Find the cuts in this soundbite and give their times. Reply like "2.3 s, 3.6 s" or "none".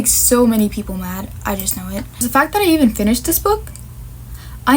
2.1 s

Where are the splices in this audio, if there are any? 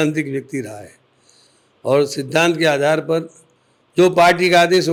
none

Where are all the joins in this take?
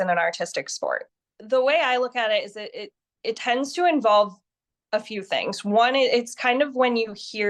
1.1 s

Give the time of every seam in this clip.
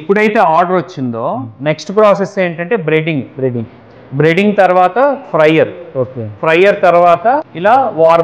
none

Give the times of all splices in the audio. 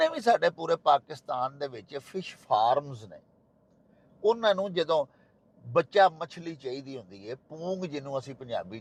none

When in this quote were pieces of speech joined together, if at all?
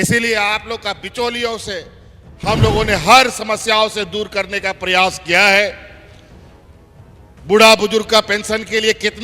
5.9 s, 7.4 s

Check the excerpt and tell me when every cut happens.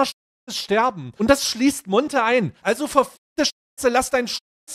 1.1 s, 2.5 s

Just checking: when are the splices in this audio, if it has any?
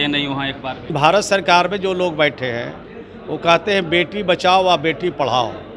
0.9 s

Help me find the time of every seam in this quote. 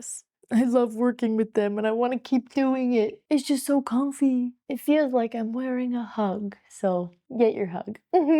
7.2 s

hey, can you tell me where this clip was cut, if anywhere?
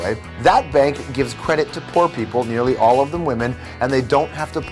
2.6 s

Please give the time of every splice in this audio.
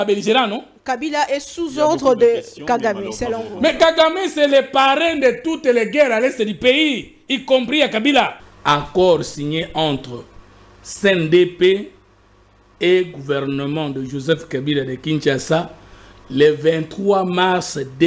8.5 s

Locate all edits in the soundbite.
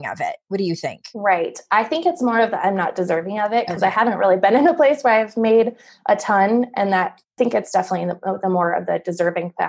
7.3 s

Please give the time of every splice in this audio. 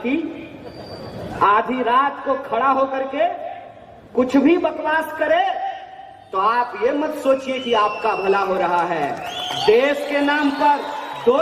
none

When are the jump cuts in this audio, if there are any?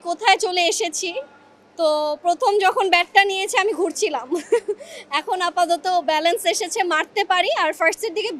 none

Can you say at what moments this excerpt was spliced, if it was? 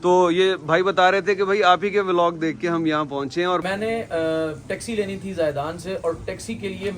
3.6 s

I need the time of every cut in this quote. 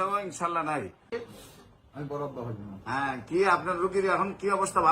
1.1 s

